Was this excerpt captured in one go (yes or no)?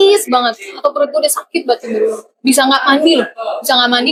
yes